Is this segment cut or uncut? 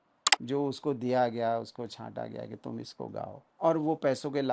cut